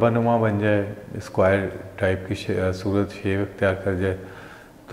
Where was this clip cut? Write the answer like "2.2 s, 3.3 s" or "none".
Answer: none